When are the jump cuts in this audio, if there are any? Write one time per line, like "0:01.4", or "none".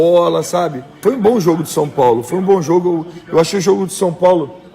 0:01.0